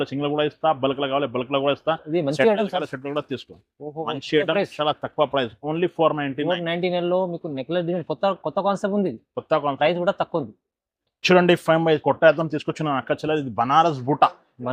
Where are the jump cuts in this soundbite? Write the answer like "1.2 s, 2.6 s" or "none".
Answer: none